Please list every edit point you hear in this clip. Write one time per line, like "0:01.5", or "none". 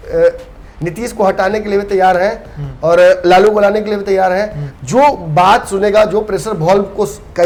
none